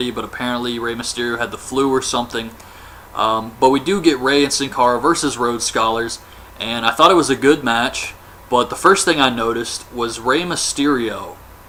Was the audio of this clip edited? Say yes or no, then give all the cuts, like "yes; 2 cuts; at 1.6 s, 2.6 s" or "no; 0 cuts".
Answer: no; 0 cuts